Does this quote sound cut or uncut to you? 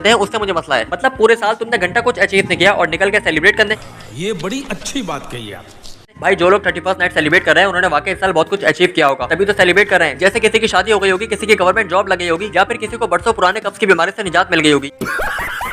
uncut